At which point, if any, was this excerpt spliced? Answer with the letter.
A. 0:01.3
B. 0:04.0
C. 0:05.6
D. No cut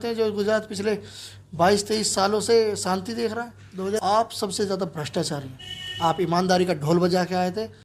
B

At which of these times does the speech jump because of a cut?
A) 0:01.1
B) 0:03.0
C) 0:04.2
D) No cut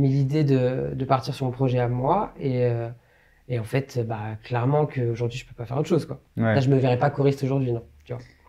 D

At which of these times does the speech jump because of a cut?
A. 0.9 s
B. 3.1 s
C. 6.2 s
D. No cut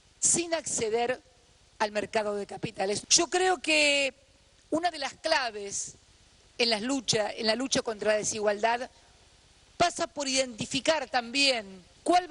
D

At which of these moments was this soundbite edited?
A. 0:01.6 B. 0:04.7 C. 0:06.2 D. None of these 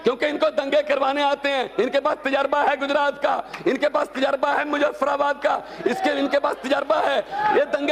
D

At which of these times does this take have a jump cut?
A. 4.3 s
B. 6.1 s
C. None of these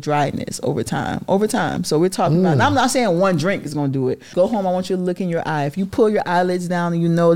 A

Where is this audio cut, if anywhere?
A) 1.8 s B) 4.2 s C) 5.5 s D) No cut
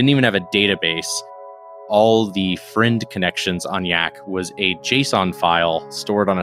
A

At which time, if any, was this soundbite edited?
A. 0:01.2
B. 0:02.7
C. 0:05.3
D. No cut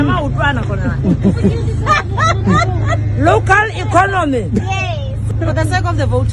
C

